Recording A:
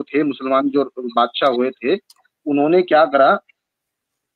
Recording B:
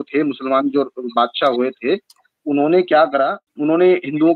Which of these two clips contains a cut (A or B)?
B